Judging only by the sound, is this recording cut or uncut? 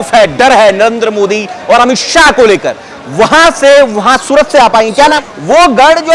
cut